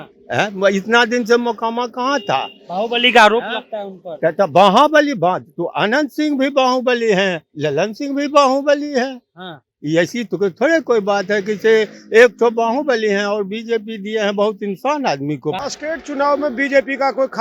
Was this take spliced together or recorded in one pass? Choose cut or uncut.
cut